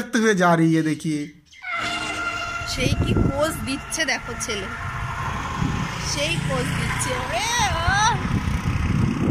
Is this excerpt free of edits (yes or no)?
no